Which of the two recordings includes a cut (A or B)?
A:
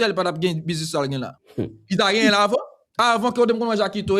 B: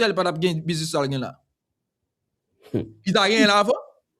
A